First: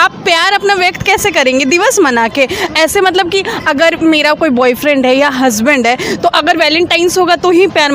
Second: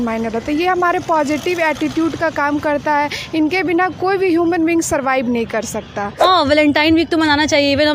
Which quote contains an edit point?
second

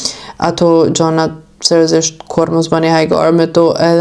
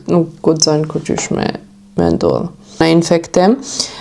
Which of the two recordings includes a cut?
second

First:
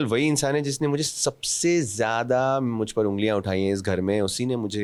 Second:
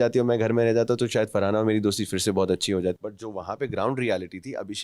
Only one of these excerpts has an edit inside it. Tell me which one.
second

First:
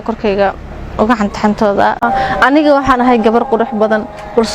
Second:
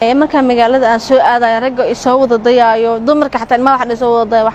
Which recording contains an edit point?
first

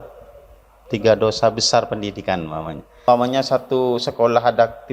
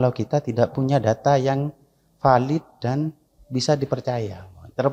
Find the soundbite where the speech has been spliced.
first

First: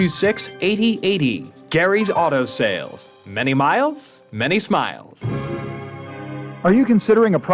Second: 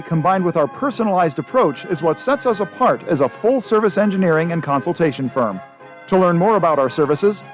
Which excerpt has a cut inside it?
first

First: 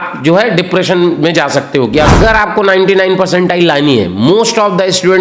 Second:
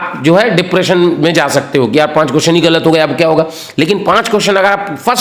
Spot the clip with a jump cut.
first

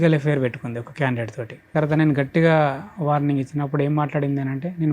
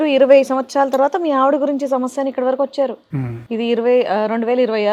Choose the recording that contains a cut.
first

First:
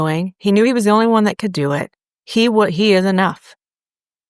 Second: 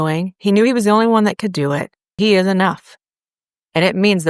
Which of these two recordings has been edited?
second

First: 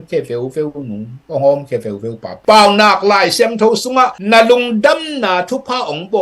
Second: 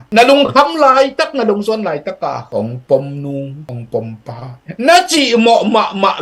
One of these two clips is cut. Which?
first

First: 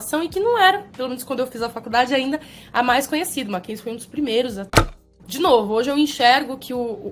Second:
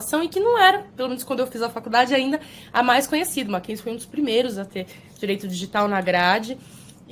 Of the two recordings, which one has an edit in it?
first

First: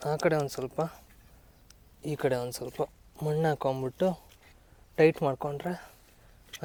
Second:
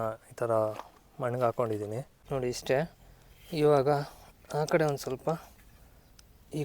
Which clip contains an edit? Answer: second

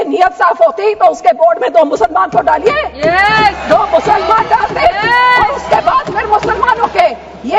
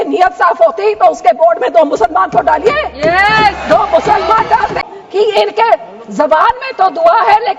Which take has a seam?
second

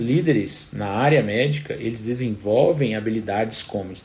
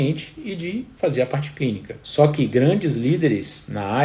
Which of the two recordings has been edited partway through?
second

